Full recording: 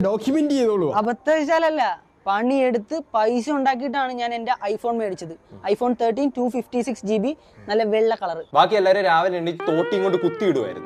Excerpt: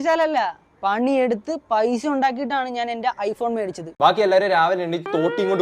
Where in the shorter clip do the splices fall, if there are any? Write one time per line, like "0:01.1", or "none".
0:03.9